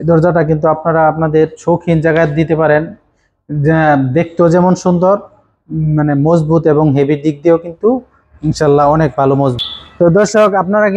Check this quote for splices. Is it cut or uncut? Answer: cut